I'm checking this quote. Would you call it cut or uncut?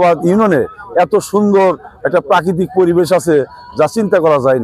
uncut